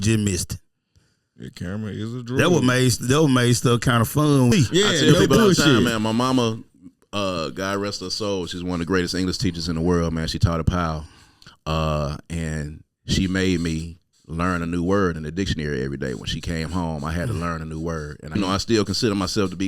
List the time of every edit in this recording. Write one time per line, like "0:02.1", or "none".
0:04.5
0:18.4